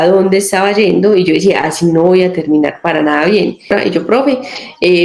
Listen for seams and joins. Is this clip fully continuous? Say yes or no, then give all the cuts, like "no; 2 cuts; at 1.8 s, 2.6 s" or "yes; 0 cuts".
no; 1 cut; at 3.7 s